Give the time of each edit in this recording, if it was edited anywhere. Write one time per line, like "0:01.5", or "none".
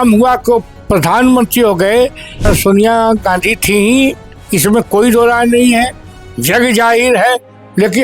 0:02.5

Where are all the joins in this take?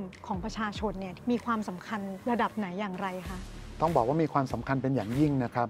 0:01.1
0:02.1

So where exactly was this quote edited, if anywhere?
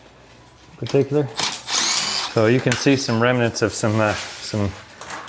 0:02.2

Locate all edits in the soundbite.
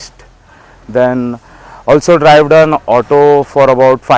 none

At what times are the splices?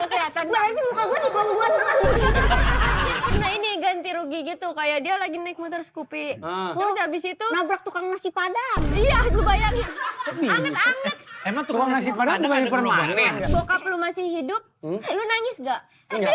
0:03.3
0:13.3

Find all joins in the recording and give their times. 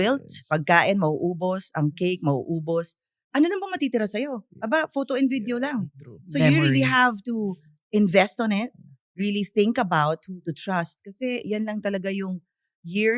none

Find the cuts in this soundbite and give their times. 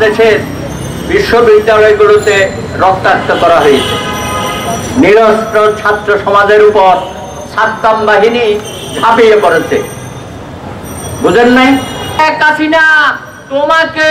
0:12.2

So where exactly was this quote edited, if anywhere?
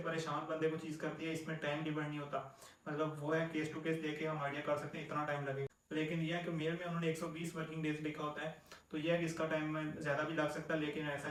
none

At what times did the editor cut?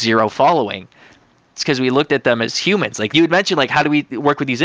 0:03.1

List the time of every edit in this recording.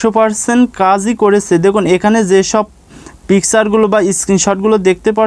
none

